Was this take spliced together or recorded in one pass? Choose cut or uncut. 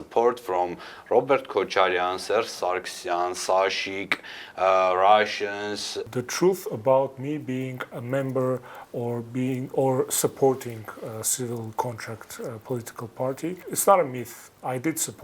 cut